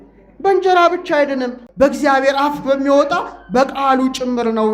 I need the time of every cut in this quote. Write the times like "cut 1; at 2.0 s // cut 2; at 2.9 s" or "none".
cut 1; at 1.6 s